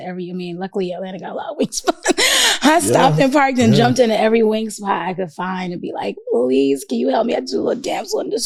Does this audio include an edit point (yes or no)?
no